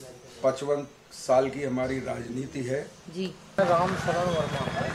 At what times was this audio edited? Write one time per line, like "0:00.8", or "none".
0:03.5

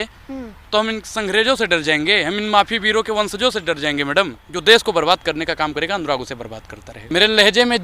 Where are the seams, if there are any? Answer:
0:04.4
0:07.0

